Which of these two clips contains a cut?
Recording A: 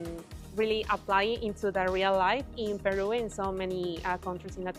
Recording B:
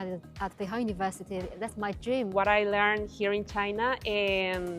B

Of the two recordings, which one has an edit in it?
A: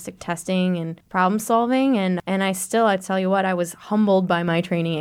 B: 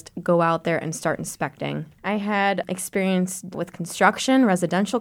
B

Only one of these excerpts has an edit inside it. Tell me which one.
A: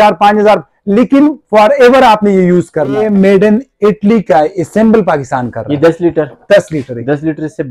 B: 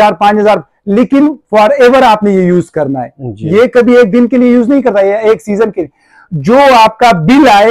A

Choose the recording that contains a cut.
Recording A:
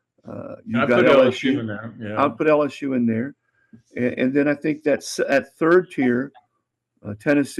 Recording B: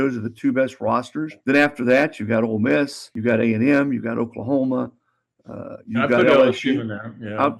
B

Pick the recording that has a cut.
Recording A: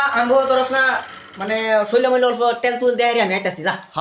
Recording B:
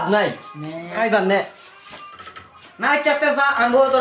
B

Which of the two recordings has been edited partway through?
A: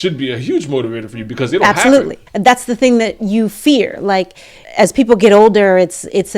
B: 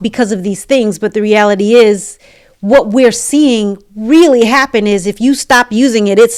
A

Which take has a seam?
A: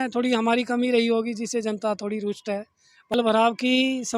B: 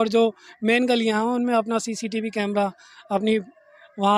A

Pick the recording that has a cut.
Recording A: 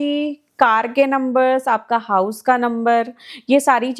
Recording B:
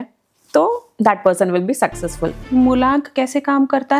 B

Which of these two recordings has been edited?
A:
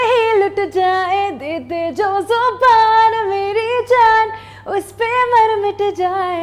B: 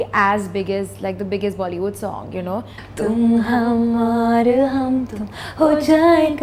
B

